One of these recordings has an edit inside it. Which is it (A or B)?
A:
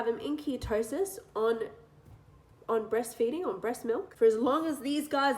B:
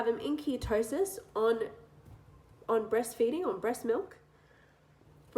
A